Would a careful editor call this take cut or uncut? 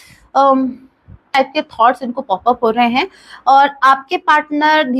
cut